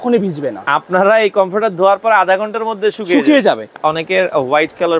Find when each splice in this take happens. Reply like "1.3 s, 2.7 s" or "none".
3.7 s